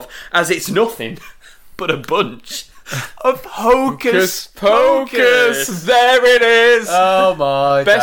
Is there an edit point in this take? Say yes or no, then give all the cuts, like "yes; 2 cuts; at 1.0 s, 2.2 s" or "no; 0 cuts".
no; 0 cuts